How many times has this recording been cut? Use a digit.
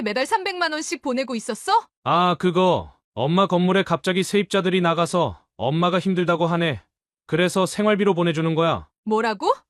1